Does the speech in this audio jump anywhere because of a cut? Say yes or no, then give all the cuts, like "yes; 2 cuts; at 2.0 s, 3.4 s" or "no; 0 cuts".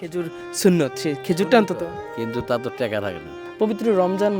yes; 1 cut; at 3.4 s